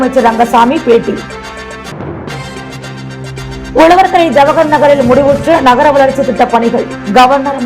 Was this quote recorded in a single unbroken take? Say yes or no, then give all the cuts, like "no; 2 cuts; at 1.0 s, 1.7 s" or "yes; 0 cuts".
yes; 0 cuts